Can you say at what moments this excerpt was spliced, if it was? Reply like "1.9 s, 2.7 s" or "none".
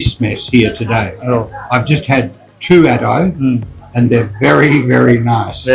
none